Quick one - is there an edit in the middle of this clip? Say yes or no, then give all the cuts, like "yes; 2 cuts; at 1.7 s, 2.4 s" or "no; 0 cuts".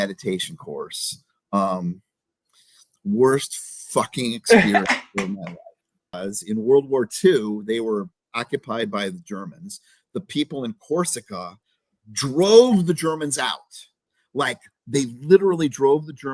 yes; 1 cut; at 6.2 s